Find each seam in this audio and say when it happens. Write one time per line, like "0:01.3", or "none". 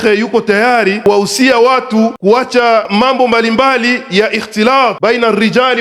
0:01.0
0:02.2
0:02.9
0:05.0